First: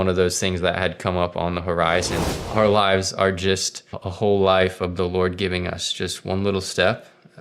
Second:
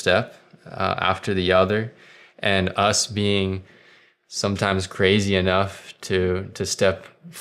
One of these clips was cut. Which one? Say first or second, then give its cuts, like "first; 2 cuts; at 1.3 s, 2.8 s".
first; 2 cuts; at 2.2 s, 4.0 s